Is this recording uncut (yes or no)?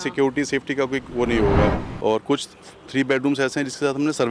no